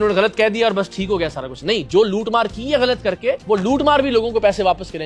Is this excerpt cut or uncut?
cut